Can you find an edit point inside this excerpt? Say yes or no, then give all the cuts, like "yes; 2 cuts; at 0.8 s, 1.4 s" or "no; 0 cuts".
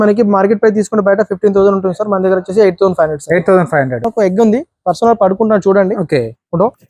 yes; 1 cut; at 4.0 s